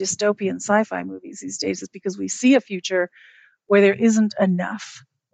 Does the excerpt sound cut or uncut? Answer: uncut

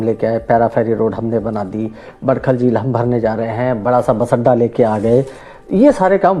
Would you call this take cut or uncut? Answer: uncut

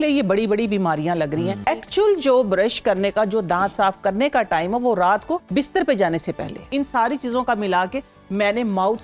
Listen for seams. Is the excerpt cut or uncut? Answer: cut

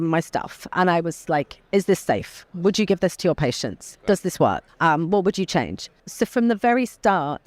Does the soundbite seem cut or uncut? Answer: cut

